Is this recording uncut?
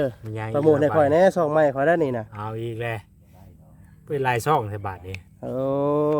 yes; 0 cuts

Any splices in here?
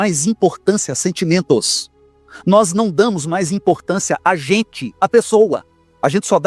no; 0 cuts

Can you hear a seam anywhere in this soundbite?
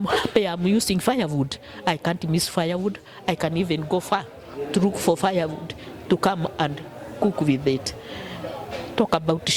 no; 0 cuts

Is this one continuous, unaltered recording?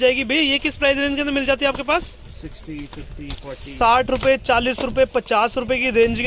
yes; 0 cuts

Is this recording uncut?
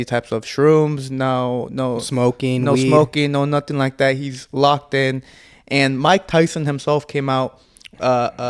yes; 0 cuts

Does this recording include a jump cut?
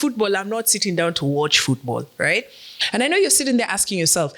yes; 1 cut; at 2.8 s

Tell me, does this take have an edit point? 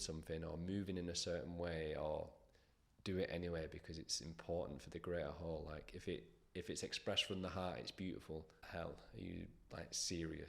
yes; 1 cut; at 8.6 s

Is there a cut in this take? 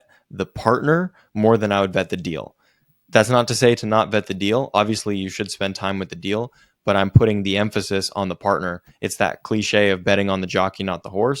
no; 0 cuts

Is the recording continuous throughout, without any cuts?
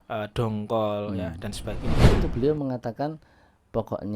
no; 1 cut; at 2.0 s

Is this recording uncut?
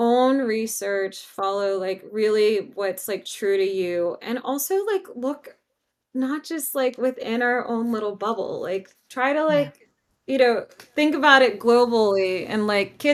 yes; 0 cuts

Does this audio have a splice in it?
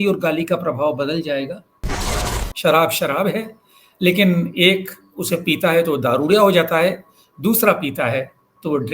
yes; 1 cut; at 2.5 s

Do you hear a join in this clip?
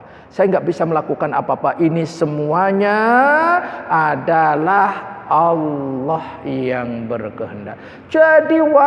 no; 0 cuts

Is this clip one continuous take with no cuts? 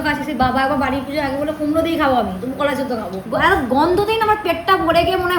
no; 1 cut; at 3.2 s

